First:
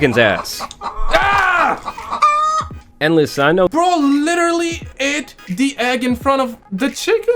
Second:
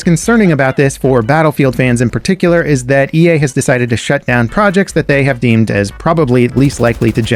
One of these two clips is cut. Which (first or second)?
first